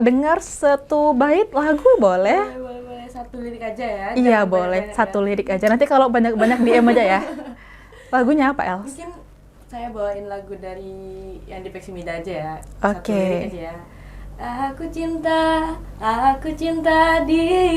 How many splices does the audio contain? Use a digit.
0